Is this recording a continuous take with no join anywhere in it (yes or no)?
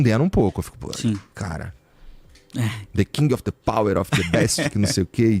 yes